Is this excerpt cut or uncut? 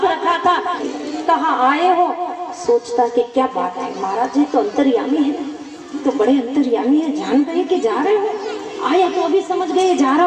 cut